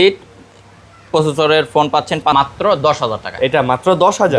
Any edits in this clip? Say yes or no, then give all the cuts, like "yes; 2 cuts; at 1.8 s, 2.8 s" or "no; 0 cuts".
yes; 1 cut; at 2.3 s